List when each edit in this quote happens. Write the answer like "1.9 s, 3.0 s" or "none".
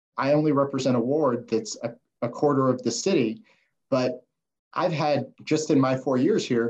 none